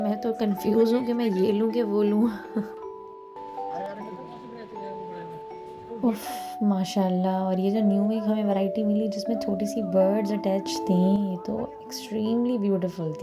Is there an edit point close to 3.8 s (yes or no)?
yes